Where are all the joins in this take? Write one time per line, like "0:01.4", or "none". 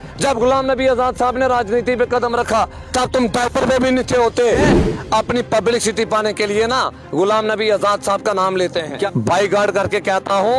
0:02.8
0:04.6
0:09.1